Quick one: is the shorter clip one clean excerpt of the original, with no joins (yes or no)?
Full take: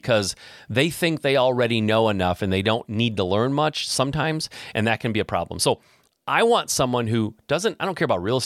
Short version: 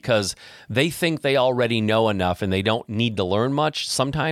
yes